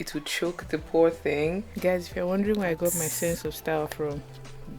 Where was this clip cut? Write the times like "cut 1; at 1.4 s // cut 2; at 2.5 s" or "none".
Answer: cut 1; at 1.7 s